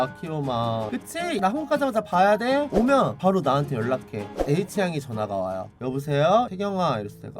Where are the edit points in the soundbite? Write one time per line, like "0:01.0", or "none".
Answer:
0:02.7
0:04.2
0:05.7